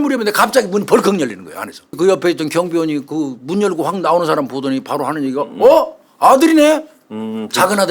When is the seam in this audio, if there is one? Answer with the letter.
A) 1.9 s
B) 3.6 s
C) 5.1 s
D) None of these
A